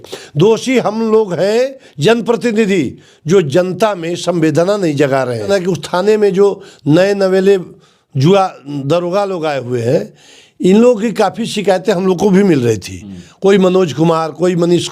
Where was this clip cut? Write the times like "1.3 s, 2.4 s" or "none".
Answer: 5.5 s